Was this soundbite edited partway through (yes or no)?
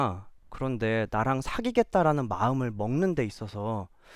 no